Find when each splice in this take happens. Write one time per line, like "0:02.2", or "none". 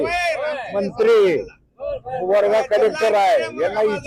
none